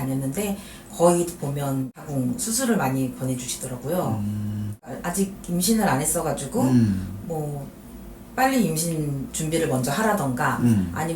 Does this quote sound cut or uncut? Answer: cut